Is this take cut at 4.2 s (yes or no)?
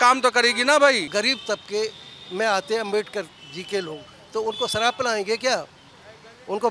no